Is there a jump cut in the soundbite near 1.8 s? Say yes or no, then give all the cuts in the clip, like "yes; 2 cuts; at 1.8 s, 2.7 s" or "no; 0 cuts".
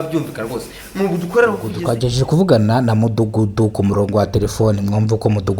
yes; 1 cut; at 1.8 s